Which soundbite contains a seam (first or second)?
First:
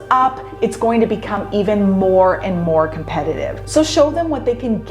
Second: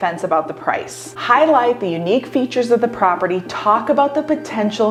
first